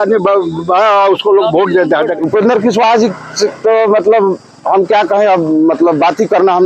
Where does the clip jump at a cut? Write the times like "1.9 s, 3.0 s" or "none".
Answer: 2.2 s